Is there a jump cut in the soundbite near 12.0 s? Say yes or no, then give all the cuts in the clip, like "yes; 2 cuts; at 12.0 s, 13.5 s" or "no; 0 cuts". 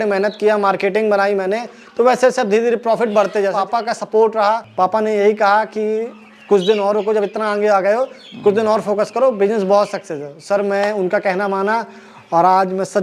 no; 2 cuts; at 3.6 s, 4.7 s